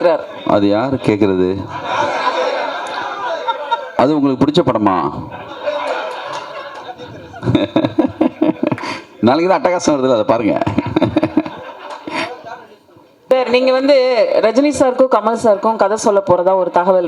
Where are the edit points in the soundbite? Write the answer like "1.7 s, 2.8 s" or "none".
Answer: 13.3 s